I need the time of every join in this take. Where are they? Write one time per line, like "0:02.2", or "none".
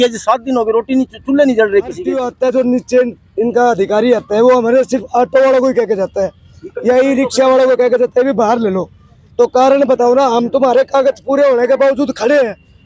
0:02.3